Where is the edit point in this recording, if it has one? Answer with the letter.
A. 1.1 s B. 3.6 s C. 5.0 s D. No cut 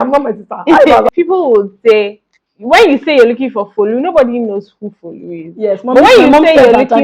A